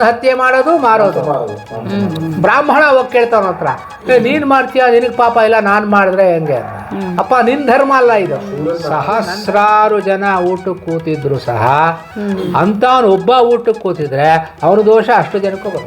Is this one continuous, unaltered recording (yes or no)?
no